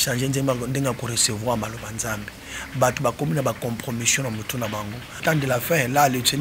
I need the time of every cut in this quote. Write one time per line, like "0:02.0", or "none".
0:05.2